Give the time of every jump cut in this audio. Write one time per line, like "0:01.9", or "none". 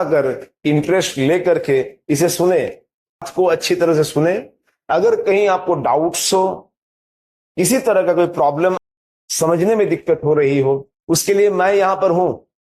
0:03.3
0:09.0